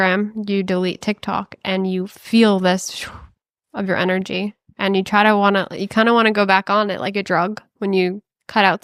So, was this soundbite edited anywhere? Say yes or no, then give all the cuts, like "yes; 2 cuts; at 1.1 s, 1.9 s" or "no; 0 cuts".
no; 0 cuts